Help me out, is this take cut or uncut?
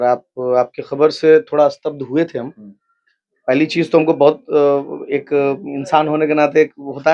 uncut